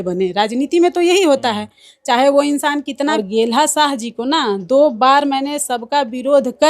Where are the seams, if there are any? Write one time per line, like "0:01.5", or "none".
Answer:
0:03.1